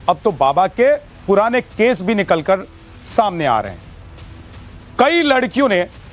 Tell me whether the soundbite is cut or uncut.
uncut